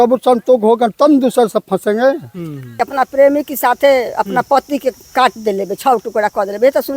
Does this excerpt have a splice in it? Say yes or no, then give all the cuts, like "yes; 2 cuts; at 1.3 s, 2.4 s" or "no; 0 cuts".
yes; 1 cut; at 2.7 s